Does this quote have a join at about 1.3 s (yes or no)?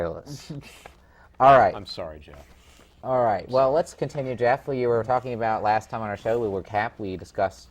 yes